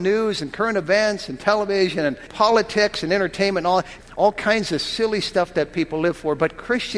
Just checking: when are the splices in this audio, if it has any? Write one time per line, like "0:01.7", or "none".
0:02.3
0:03.9